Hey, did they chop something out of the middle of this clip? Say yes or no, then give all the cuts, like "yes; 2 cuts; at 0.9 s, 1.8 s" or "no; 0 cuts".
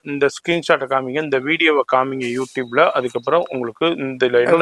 no; 0 cuts